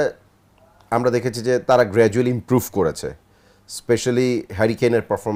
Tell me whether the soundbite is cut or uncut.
uncut